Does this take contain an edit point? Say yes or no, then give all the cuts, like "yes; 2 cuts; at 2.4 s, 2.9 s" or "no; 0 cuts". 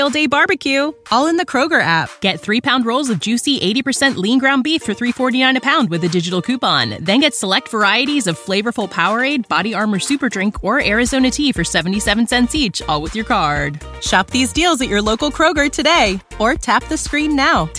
no; 0 cuts